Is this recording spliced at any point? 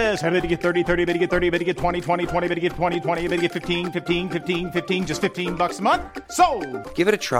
no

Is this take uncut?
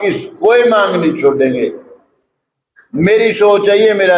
yes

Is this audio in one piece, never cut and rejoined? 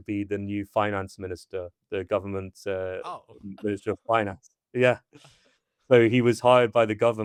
yes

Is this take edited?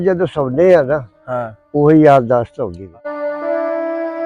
yes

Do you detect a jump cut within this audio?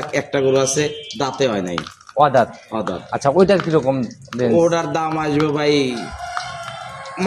no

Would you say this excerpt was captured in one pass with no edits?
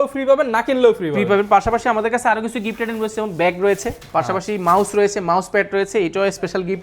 yes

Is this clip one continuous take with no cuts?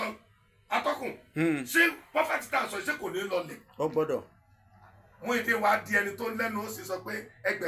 yes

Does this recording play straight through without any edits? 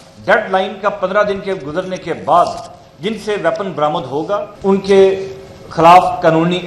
no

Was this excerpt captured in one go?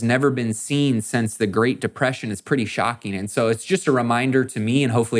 yes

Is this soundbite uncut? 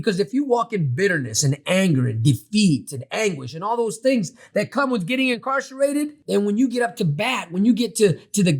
no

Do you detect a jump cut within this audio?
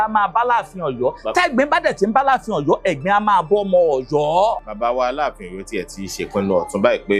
no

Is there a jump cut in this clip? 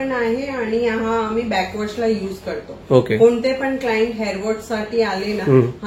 no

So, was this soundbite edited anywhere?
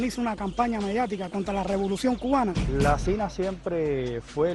yes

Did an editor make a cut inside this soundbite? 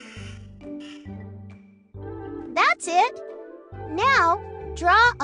yes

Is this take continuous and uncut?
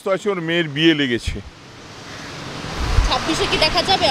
yes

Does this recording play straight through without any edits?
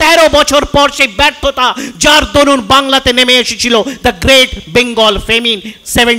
yes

